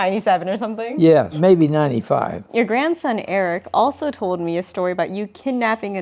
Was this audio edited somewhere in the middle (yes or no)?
yes